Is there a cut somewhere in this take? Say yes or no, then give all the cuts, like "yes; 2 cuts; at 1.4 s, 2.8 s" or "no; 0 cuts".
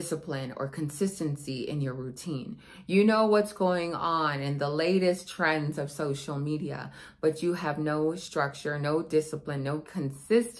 no; 0 cuts